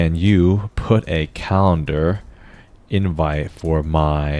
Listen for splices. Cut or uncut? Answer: uncut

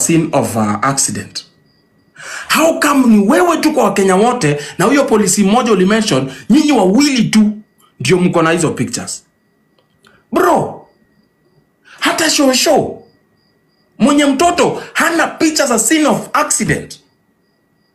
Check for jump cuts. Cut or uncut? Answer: uncut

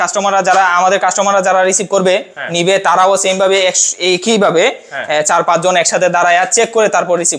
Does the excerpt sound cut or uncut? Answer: uncut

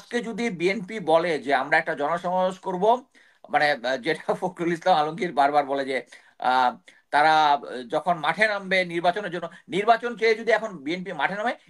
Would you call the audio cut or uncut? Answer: uncut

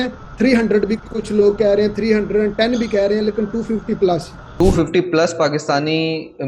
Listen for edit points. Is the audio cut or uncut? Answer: cut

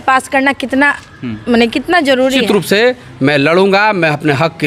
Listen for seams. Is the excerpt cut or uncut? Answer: cut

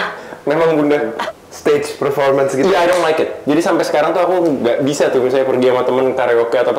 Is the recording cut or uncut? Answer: cut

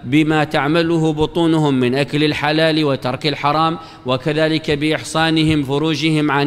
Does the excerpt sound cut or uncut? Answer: cut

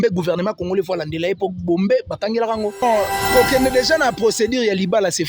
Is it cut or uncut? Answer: cut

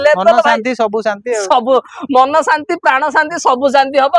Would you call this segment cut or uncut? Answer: uncut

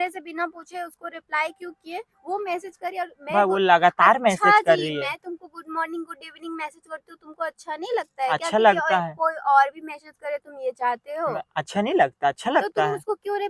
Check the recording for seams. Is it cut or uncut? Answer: uncut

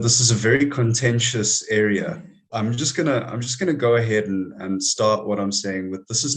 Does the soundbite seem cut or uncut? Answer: cut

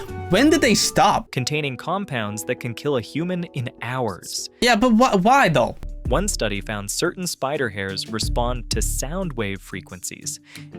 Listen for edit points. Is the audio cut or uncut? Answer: cut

